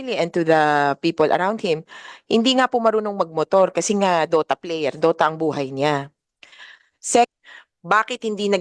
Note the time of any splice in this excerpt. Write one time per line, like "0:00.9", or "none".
0:07.3